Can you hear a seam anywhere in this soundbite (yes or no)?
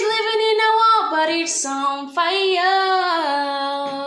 no